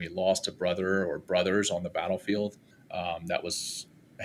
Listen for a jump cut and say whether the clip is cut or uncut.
uncut